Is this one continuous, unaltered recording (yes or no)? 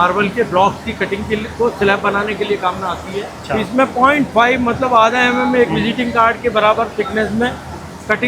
no